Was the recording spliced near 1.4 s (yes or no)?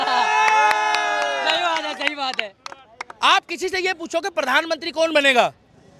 no